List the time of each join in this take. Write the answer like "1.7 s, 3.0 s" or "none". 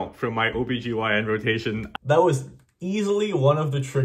1.8 s